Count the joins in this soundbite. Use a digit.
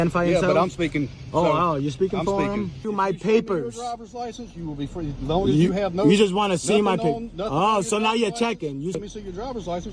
2